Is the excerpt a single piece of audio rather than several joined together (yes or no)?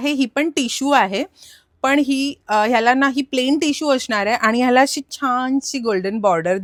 yes